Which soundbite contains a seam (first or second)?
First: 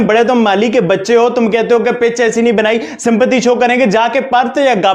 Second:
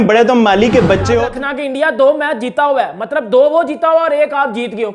second